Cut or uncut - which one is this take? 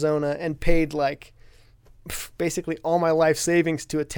uncut